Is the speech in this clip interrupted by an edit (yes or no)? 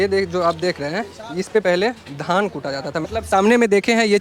yes